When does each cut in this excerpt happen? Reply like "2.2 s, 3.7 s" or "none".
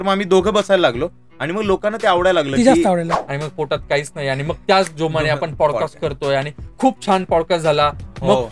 3.1 s